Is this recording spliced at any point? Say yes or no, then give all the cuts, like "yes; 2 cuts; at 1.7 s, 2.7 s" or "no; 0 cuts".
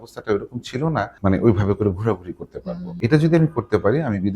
yes; 2 cuts; at 1.1 s, 2.9 s